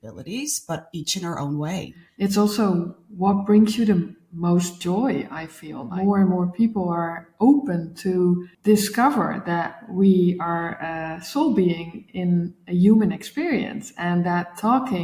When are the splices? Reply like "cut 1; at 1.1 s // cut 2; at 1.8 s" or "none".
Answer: cut 1; at 2.0 s // cut 2; at 5.8 s // cut 3; at 8.5 s